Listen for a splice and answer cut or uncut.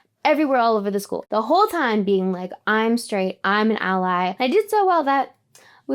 cut